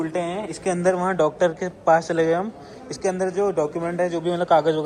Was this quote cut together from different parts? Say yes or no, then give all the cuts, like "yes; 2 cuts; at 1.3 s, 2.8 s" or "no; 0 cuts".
no; 0 cuts